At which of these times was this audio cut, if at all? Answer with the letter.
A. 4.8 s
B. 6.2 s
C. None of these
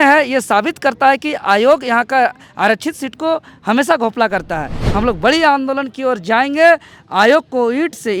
A